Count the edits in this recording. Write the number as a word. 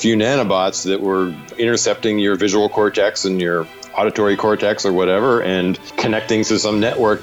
two